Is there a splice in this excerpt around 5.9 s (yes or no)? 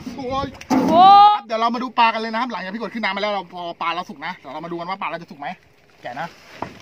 no